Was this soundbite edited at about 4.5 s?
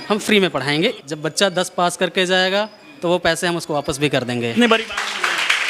yes; 2 cuts; at 0.9 s, 4.5 s

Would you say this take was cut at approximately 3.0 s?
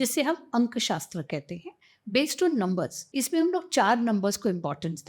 yes; 1 cut; at 3.0 s

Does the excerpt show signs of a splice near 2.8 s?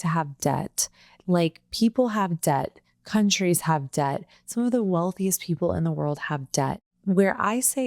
no; 1 cut; at 6.9 s

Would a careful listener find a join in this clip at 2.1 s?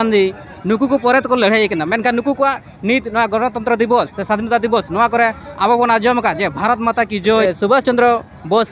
no; 1 cut; at 7.4 s

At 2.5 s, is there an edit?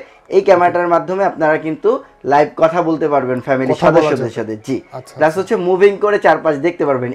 no; 0 cuts

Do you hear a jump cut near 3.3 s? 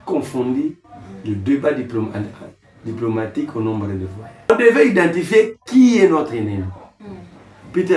no; 1 cut; at 4.5 s

